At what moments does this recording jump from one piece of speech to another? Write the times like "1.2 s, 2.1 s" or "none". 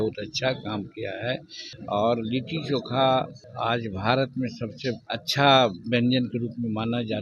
1.7 s, 3.4 s, 5.1 s